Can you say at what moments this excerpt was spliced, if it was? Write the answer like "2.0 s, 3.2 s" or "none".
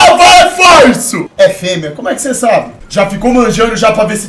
1.3 s, 2.8 s